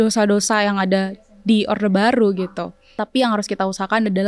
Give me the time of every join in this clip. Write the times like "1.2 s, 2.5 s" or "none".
3.0 s

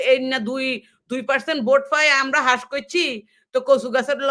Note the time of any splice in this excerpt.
none

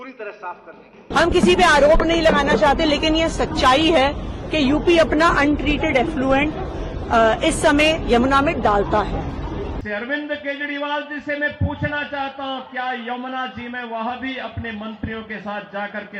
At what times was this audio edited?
1.0 s, 9.7 s

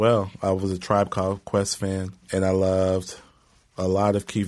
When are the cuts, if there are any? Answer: 2.2 s

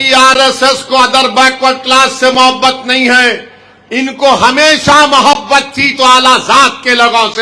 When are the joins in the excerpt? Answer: none

